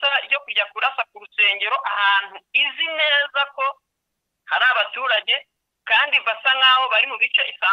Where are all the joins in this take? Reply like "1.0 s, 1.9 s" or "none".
none